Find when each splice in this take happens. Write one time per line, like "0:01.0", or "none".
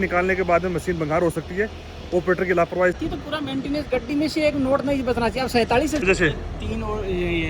0:03.0
0:06.0